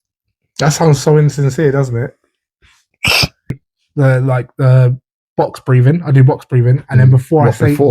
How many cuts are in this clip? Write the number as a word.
one